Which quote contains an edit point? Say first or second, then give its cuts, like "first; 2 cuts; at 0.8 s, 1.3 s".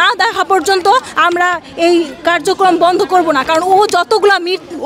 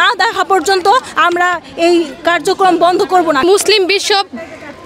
second; 1 cut; at 3.4 s